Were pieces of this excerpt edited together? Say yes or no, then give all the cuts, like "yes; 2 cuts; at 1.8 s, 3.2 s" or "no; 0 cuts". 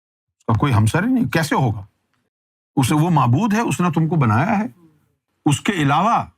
yes; 1 cut; at 5.2 s